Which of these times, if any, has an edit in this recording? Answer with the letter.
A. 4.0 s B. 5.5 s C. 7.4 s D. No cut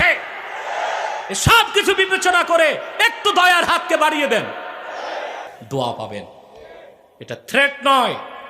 B